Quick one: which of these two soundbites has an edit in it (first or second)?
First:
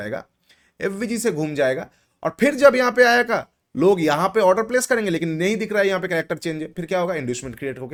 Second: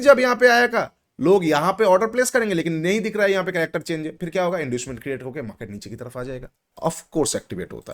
second